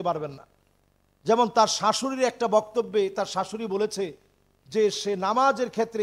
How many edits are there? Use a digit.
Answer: 0